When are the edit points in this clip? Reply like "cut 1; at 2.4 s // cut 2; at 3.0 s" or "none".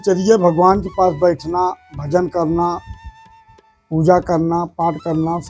none

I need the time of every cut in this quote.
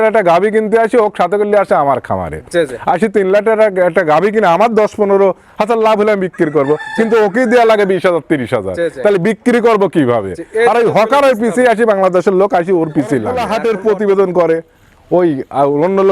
cut 1; at 13.4 s

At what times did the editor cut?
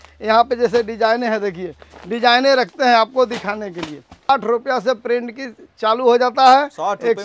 cut 1; at 4.3 s

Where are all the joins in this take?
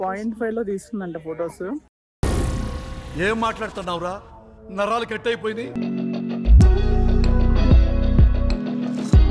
none

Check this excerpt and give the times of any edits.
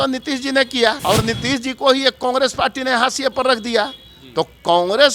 cut 1; at 1.0 s

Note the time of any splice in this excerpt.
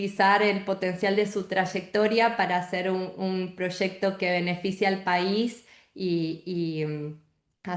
none

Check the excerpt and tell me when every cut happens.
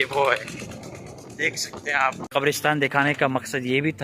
cut 1; at 2.2 s

